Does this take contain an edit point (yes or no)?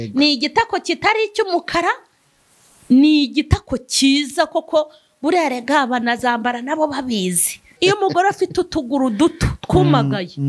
yes